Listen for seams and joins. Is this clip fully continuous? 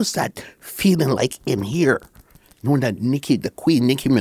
yes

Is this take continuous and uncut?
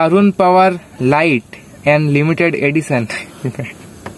yes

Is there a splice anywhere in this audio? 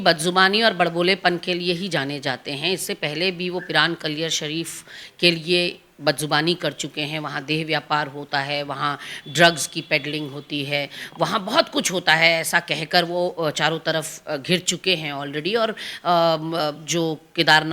no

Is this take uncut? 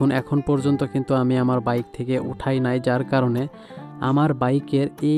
yes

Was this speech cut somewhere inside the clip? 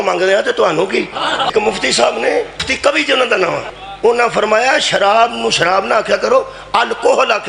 yes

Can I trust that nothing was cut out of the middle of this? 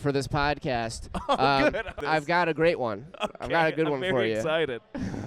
no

